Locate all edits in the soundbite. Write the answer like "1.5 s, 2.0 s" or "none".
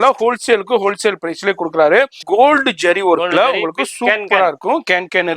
2.2 s